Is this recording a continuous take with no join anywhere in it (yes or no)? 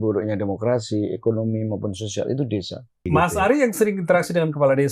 no